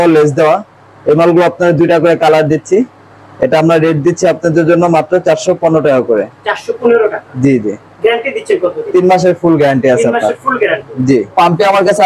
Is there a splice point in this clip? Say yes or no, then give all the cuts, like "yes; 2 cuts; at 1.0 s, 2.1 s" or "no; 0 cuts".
no; 0 cuts